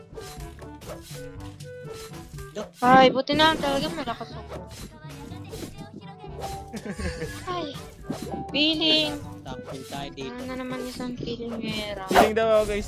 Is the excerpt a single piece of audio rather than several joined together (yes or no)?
yes